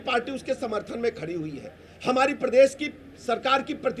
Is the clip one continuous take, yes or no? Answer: yes